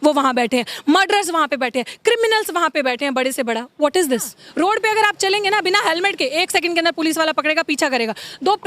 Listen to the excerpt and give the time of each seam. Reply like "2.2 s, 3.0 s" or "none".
4.4 s